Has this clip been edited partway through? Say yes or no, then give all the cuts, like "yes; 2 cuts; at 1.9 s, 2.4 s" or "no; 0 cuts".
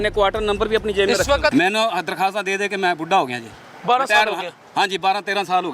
yes; 1 cut; at 1.5 s